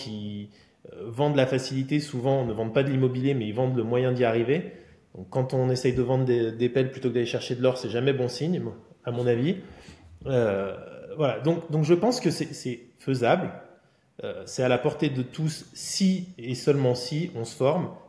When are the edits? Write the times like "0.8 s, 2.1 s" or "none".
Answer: none